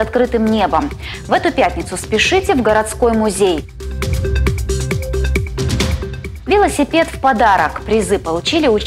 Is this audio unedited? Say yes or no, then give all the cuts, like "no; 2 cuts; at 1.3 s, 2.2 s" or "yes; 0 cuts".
yes; 0 cuts